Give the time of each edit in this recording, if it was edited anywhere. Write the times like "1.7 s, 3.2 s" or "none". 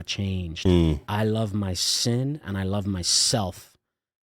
1.1 s